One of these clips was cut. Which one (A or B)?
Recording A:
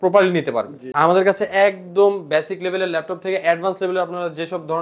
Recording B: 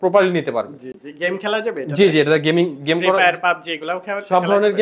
A